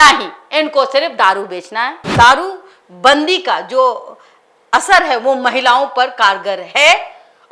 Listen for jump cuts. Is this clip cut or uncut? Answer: cut